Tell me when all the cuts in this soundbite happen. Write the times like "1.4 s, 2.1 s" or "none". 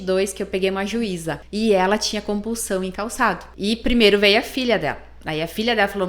1.4 s, 3.5 s